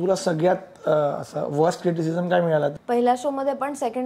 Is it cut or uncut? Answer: cut